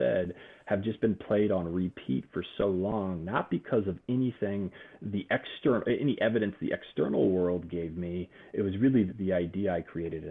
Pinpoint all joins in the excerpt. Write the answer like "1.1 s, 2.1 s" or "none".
9.1 s